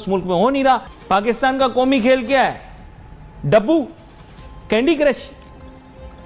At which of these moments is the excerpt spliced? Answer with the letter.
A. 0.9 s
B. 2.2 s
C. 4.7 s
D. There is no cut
A